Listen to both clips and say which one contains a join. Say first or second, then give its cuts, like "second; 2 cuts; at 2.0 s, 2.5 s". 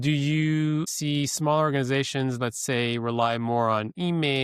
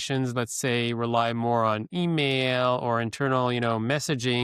first; 1 cut; at 0.9 s